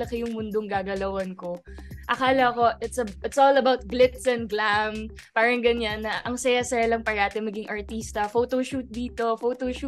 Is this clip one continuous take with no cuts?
yes; 0 cuts

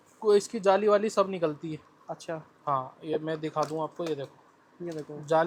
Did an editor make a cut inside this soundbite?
no; 0 cuts

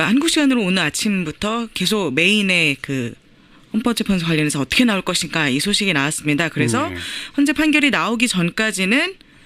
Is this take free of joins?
no; 1 cut; at 1.2 s

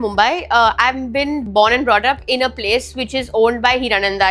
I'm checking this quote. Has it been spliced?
yes; 1 cut; at 1.4 s

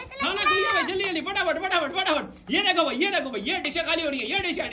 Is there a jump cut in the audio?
no; 0 cuts

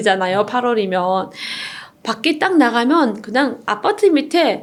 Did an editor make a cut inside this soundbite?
no; 0 cuts

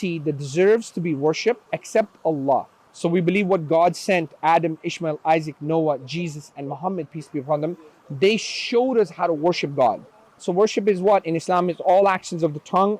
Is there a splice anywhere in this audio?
yes; 2 cuts; at 2.8 s, 10.4 s

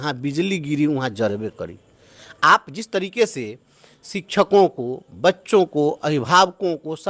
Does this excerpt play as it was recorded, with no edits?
yes; 0 cuts

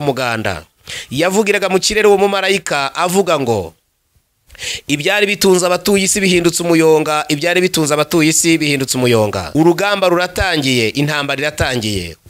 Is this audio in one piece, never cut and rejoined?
no; 1 cut; at 9.4 s

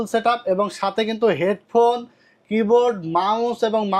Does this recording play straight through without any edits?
yes; 0 cuts

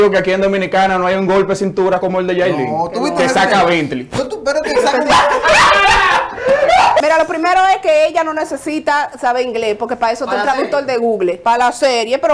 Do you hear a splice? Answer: yes; 3 cuts; at 2.0 s, 7.0 s, 11.4 s

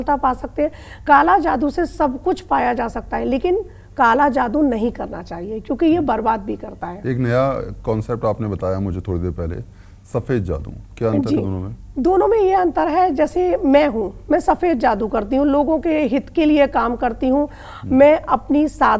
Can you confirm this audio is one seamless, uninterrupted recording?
yes; 0 cuts

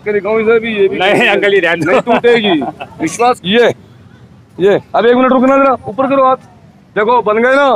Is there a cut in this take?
yes; 1 cut; at 3.4 s

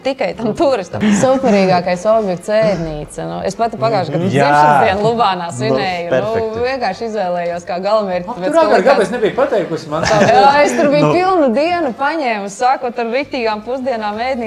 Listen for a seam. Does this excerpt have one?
yes; 1 cut; at 1.0 s

